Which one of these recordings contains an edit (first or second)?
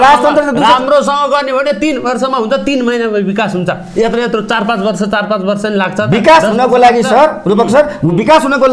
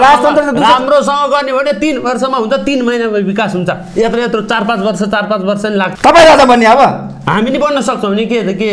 second